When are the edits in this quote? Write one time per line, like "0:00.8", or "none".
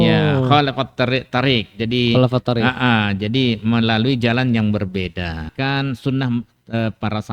0:05.5